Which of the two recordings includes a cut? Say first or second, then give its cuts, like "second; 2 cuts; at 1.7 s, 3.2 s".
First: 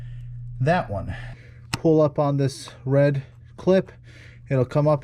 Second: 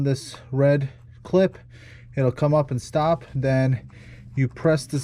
first; 1 cut; at 1.4 s